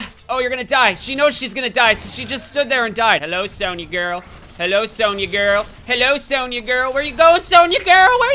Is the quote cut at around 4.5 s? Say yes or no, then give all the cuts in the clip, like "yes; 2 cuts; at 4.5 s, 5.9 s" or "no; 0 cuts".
no; 1 cut; at 3.2 s